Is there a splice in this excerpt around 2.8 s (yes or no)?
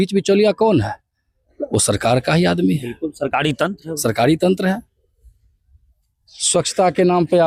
no